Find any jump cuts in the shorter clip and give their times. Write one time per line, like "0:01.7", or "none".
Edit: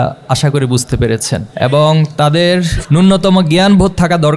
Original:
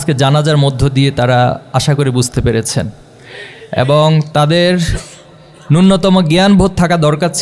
0:01.5
0:02.8